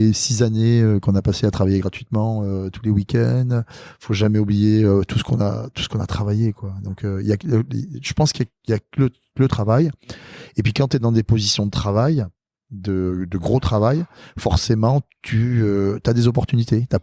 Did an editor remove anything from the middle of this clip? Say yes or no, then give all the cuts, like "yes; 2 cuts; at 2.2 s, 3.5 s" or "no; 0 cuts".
no; 0 cuts